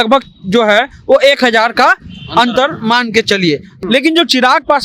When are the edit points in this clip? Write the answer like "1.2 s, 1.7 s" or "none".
3.7 s